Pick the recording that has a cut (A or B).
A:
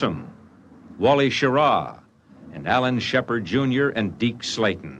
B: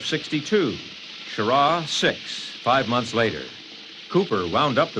A